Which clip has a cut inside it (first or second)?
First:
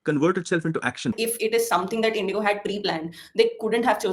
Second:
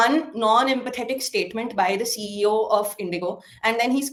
first